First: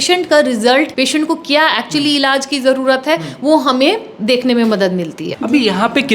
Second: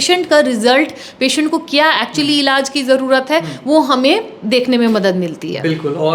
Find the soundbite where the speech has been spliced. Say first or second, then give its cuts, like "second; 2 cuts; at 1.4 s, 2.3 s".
first; 2 cuts; at 0.9 s, 5.2 s